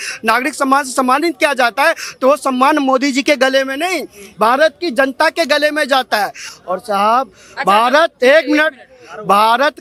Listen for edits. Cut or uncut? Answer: uncut